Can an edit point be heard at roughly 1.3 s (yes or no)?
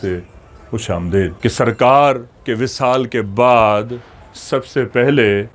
yes